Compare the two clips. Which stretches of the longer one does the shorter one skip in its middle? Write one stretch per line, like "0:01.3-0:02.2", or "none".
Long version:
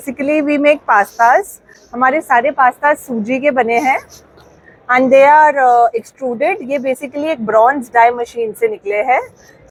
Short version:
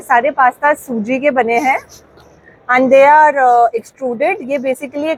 none